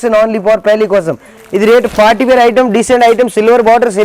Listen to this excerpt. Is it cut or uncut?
cut